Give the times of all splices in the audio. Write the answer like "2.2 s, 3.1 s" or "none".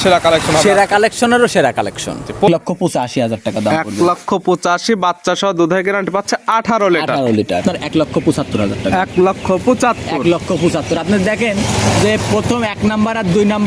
2.5 s, 7.6 s